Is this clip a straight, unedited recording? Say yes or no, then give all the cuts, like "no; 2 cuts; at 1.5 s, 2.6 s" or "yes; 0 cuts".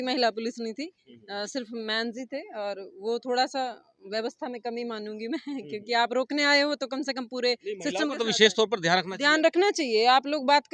yes; 0 cuts